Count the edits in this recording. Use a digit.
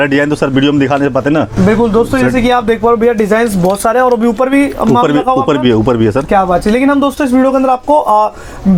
0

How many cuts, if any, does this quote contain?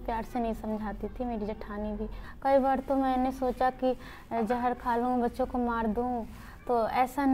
1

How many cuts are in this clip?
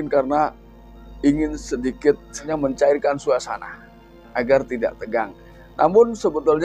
1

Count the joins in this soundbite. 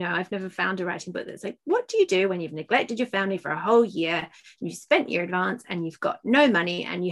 0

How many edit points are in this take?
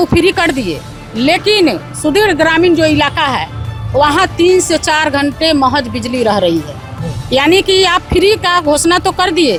0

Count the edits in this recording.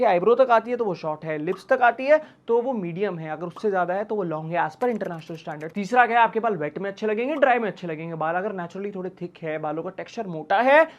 0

